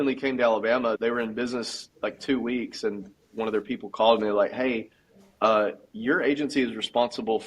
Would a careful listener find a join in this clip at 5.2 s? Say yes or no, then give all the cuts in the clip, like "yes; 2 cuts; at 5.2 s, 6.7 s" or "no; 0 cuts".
no; 1 cut; at 1.0 s